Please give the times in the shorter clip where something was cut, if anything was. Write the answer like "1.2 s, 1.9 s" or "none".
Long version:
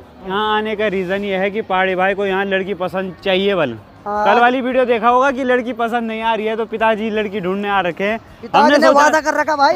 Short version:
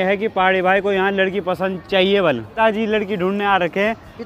2.5 s